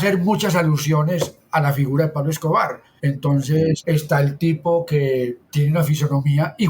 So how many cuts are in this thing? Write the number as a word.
three